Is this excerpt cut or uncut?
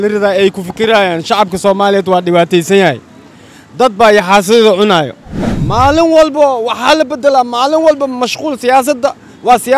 cut